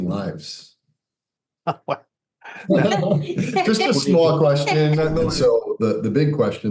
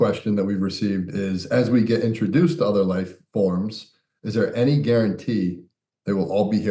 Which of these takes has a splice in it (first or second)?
first